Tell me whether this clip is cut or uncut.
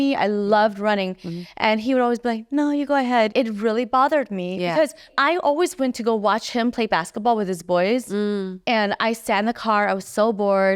cut